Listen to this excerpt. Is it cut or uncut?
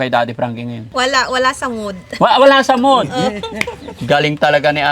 cut